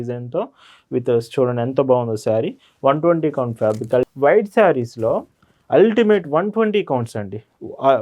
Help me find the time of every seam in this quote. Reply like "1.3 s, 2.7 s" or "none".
4.1 s